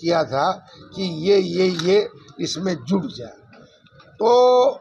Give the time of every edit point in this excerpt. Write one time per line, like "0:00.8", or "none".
none